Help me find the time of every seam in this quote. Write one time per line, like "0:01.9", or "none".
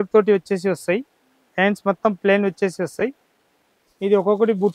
none

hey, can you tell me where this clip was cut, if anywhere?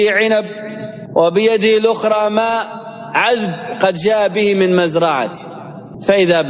none

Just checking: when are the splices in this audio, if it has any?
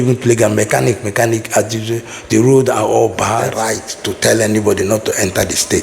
0:03.6

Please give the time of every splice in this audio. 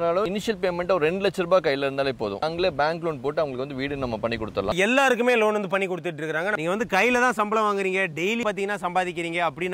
0:02.4
0:04.7
0:06.6
0:08.4

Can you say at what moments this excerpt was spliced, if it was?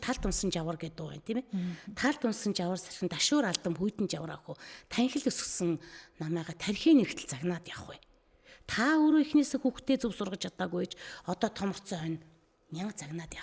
none

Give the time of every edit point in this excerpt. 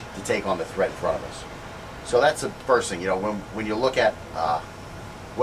none

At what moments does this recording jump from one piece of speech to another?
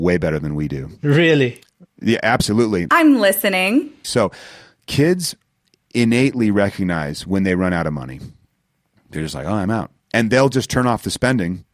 0:02.9
0:04.0

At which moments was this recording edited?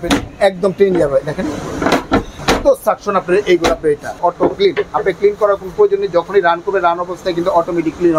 0:02.4
0:04.2

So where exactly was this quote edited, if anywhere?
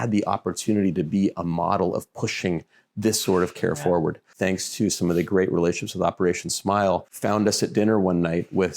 0:04.3
0:07.1

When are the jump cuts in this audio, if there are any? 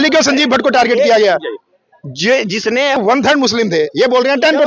0:03.0

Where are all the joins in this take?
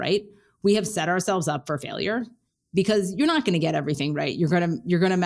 none

